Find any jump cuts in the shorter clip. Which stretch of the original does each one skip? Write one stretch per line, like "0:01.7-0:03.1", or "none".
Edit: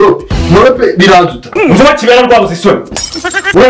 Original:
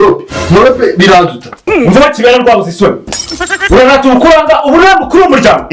0:01.7-0:01.8